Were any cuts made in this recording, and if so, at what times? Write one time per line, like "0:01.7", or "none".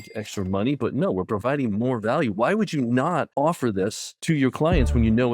0:03.3
0:04.1